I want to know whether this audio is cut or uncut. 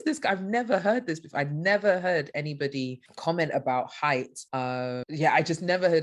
uncut